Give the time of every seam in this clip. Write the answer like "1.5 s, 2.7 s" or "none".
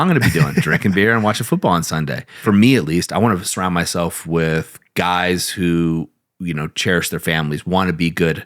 2.4 s